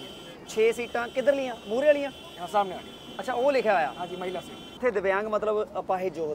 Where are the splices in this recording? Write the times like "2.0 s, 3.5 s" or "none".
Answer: 4.7 s